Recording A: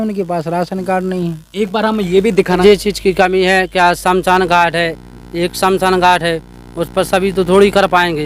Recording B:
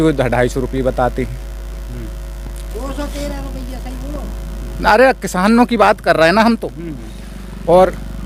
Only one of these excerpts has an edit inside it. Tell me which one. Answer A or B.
A